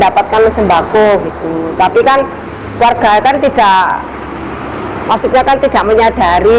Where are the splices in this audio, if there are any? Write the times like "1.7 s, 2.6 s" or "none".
none